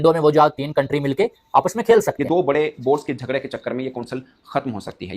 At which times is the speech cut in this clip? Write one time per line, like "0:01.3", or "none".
0:02.2